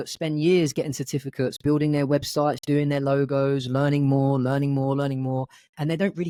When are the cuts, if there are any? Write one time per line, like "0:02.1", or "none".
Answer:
none